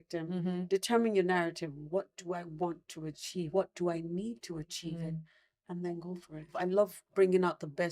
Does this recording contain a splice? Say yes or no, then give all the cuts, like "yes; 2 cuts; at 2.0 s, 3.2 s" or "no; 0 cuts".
yes; 2 cuts; at 3.5 s, 6.5 s